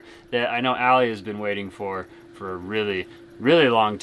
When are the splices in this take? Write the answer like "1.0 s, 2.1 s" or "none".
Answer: none